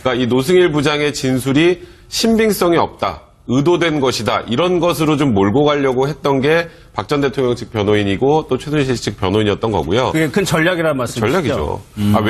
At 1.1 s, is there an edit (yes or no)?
no